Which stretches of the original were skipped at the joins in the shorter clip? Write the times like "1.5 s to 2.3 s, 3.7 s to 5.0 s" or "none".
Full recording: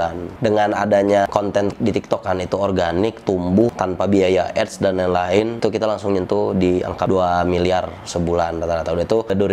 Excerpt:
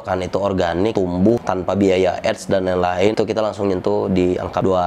3.1 s to 3.2 s, 5.5 s to 5.6 s